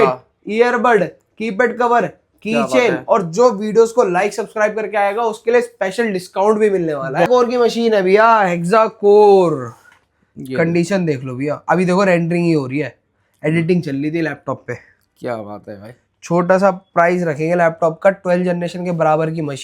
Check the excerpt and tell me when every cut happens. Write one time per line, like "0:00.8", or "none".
0:07.3